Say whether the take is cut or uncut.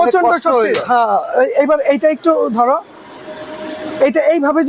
uncut